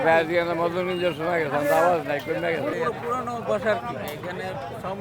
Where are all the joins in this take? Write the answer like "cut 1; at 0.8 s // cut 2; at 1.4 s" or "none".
cut 1; at 2.7 s